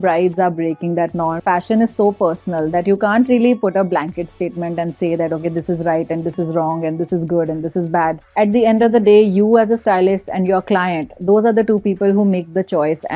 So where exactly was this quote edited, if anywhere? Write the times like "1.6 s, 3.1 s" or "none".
1.4 s, 8.2 s